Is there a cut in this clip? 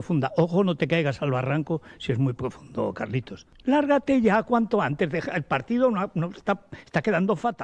no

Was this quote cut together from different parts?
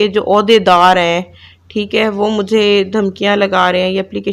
no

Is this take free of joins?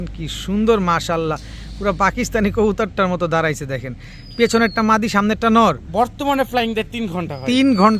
yes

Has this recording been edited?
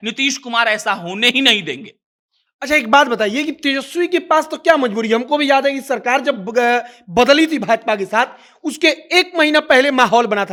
no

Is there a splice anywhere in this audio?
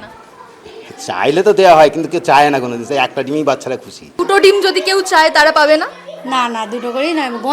yes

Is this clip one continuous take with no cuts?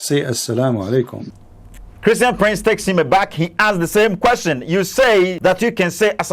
no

